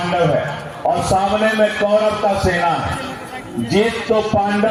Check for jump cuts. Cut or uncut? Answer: uncut